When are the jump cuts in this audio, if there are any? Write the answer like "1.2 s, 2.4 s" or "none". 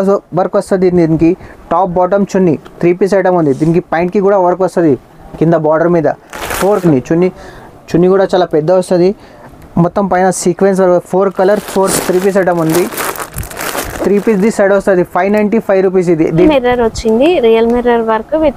6.8 s, 11.9 s, 16.4 s